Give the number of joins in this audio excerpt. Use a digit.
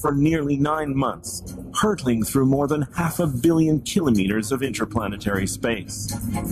1